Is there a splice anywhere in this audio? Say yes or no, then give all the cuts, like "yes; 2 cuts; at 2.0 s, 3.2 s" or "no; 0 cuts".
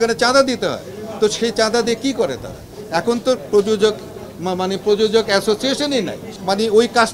no; 0 cuts